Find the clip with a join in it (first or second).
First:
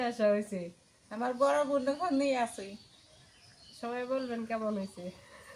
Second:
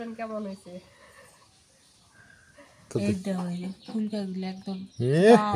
second